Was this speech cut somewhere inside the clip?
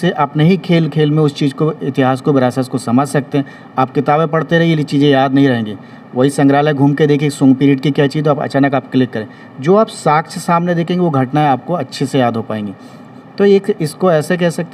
no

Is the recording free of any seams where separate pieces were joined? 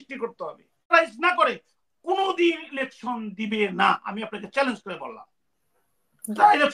no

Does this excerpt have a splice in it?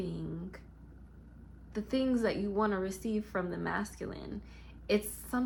no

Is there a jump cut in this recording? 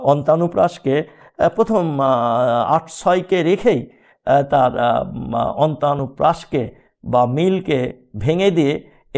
no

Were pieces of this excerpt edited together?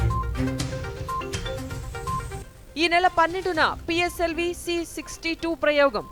no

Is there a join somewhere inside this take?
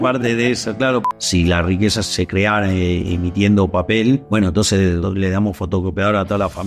yes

